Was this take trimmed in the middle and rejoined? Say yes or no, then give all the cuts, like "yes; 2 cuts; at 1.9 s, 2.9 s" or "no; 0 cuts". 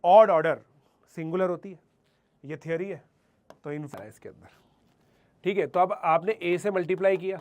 yes; 1 cut; at 3.9 s